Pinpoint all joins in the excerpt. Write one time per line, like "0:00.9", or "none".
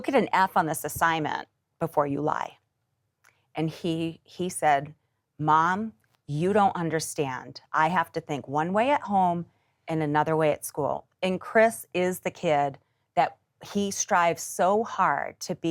none